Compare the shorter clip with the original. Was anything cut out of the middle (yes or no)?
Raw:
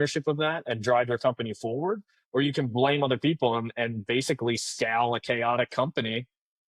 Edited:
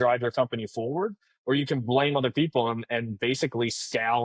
no